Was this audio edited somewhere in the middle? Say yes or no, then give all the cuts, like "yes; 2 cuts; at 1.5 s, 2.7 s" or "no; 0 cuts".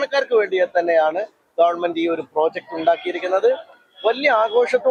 no; 0 cuts